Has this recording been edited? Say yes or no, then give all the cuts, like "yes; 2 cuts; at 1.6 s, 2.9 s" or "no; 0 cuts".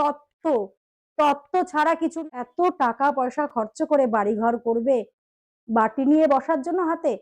yes; 1 cut; at 2.2 s